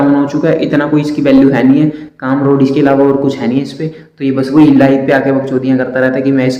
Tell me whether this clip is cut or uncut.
uncut